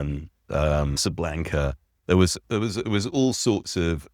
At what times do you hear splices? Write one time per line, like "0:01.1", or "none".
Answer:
0:01.0